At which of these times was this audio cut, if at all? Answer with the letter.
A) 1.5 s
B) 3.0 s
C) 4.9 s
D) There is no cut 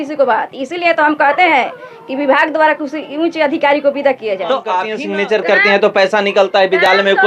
C